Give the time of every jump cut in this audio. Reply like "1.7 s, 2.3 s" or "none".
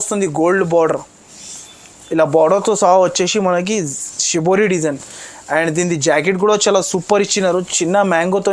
none